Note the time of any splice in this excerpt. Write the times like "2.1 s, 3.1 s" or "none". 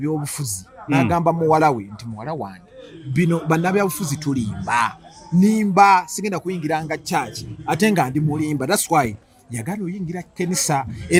none